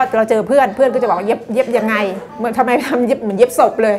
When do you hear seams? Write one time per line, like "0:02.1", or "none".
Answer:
0:02.3